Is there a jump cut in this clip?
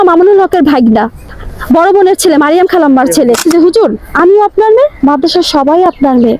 yes; 2 cuts; at 1.2 s, 3.4 s

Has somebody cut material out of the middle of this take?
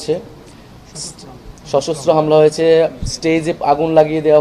no; 0 cuts

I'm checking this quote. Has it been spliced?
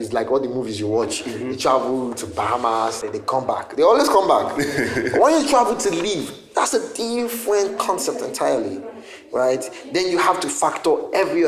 yes; 1 cut; at 3.0 s

